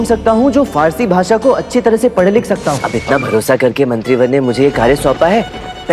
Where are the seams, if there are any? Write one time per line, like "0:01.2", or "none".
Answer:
0:02.9